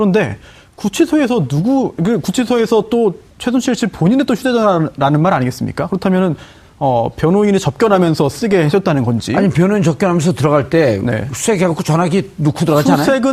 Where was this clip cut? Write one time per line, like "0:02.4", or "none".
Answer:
none